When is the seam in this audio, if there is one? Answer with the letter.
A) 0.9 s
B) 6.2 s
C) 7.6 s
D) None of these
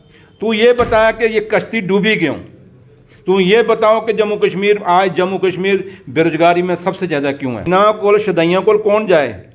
C